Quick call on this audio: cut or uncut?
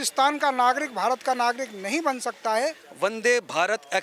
cut